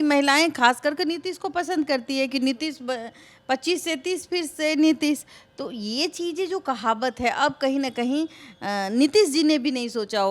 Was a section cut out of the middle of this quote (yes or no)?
no